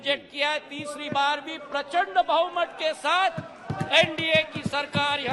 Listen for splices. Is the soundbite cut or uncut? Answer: uncut